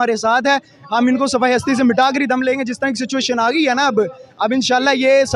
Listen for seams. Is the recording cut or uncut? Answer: uncut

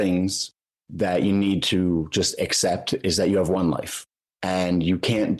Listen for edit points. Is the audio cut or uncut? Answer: uncut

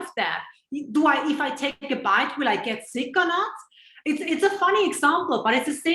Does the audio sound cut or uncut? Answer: uncut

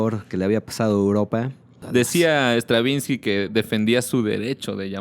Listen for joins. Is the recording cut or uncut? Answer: cut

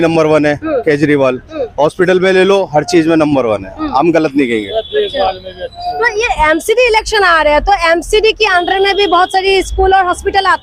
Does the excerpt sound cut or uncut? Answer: uncut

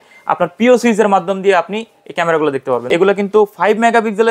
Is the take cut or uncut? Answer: cut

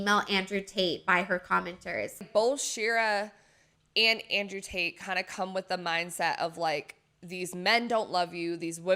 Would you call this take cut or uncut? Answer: cut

